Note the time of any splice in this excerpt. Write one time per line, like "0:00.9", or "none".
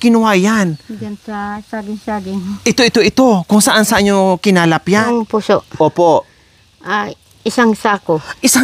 0:05.0